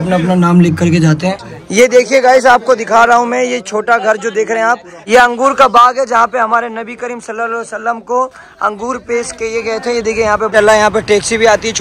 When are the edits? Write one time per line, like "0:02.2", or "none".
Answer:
0:01.5
0:04.9
0:10.5